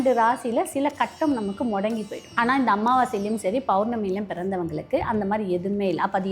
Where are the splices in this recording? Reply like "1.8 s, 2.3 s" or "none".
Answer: 2.2 s